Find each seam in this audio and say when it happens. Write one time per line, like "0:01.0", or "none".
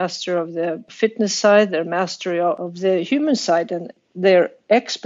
0:00.9
0:02.6
0:04.0